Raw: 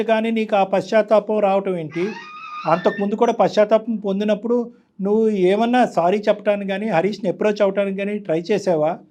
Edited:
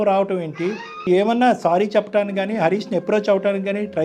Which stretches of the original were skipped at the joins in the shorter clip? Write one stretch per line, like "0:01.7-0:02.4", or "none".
0:02.4-0:05.4